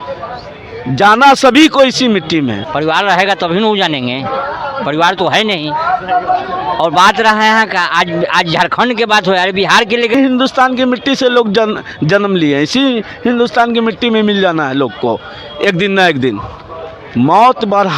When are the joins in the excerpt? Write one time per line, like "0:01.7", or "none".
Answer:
0:02.7
0:10.1

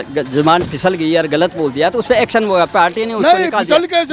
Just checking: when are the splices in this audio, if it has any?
none

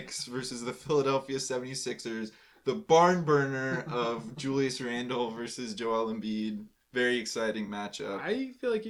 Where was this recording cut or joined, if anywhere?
none

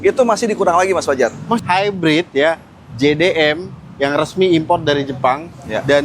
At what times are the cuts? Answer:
0:01.6

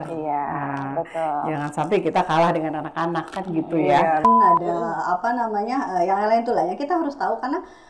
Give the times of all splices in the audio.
0:04.2

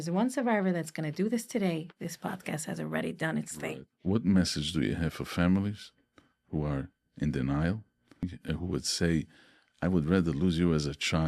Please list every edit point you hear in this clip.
0:03.9
0:08.3

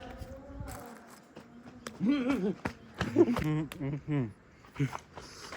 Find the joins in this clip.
0:03.4

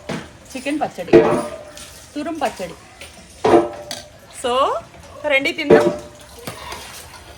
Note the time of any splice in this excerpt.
none

